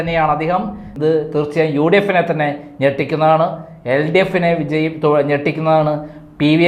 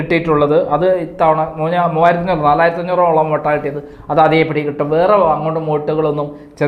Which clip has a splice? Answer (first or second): first